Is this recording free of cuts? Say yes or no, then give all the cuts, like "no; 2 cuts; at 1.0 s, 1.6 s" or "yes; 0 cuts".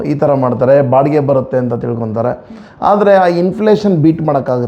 yes; 0 cuts